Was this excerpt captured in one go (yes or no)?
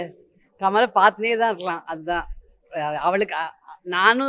yes